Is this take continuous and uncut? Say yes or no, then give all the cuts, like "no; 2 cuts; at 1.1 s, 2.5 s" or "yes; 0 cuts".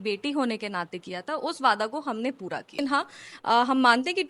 no; 1 cut; at 2.7 s